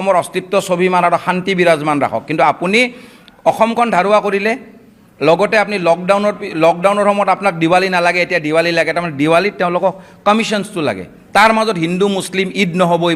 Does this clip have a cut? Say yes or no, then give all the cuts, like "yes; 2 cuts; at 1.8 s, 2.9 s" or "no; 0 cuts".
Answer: no; 0 cuts